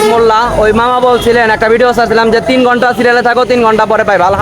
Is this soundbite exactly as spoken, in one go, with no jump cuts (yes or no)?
yes